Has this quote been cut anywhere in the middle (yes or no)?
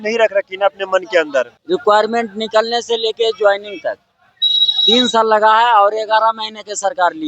yes